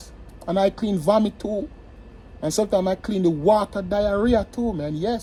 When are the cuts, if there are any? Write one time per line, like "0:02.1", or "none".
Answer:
none